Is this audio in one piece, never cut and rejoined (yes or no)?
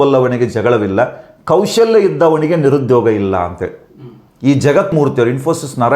no